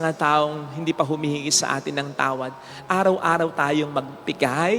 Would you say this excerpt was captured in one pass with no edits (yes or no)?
yes